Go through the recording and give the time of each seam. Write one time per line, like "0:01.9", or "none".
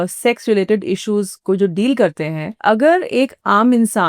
0:02.4